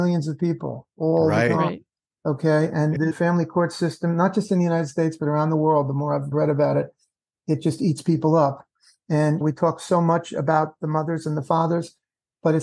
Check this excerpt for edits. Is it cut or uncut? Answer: cut